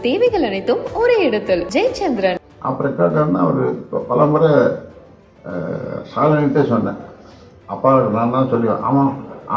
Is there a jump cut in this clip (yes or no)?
yes